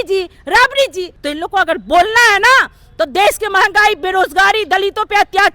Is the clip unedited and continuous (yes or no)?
no